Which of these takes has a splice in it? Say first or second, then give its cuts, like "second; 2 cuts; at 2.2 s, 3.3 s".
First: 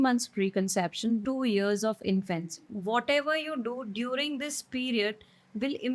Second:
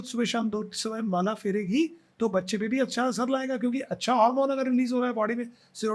first; 2 cuts; at 1.2 s, 2.7 s